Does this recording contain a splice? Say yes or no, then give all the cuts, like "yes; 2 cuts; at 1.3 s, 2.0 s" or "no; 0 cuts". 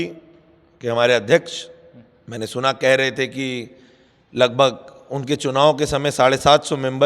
no; 0 cuts